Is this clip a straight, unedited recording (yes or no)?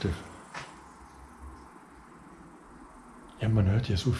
yes